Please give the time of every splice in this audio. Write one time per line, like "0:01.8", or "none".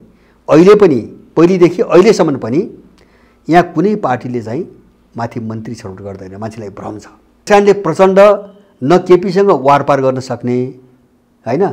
0:07.5